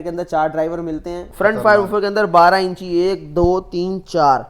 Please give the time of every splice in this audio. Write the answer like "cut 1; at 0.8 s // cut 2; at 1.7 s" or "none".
cut 1; at 1.2 s